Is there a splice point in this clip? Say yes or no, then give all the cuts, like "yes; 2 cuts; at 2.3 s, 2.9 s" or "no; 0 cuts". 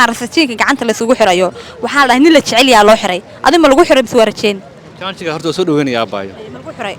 no; 0 cuts